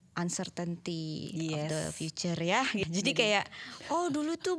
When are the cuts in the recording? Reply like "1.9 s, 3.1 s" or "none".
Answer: 2.8 s